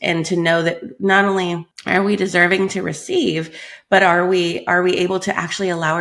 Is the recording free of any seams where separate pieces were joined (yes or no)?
no